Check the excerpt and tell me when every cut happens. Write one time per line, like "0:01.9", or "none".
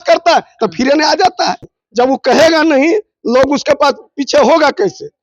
0:01.8